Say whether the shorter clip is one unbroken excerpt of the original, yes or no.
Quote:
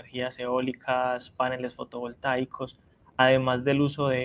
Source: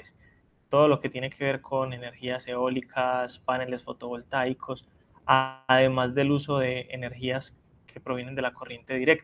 no